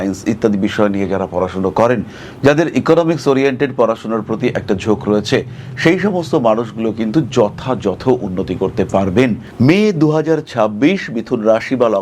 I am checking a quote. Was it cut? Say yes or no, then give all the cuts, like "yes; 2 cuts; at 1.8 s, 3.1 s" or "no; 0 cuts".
yes; 1 cut; at 9.4 s